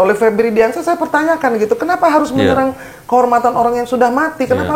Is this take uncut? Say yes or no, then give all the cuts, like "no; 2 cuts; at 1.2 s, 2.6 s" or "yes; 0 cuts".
yes; 0 cuts